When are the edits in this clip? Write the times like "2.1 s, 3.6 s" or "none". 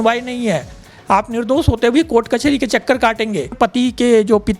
3.5 s